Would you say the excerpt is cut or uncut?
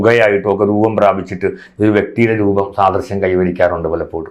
uncut